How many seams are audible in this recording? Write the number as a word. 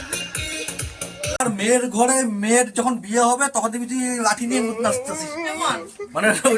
one